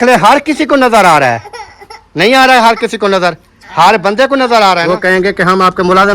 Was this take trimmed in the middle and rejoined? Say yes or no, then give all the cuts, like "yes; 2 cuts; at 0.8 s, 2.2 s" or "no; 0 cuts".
yes; 1 cut; at 4.9 s